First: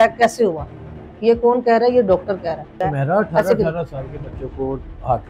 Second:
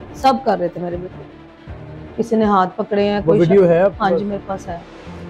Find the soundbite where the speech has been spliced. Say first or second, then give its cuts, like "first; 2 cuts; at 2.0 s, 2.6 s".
first; 1 cut; at 2.8 s